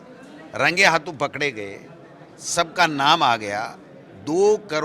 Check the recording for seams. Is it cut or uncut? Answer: uncut